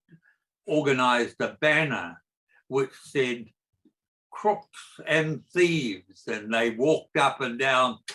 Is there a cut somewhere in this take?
no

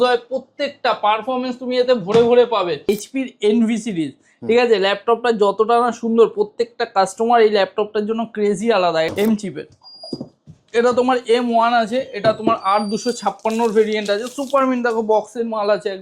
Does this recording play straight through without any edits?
no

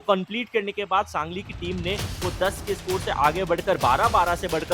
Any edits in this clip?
no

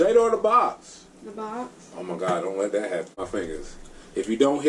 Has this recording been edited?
yes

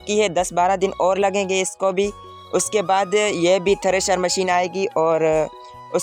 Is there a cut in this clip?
no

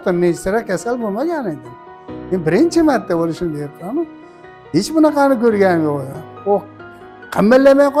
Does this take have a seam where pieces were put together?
no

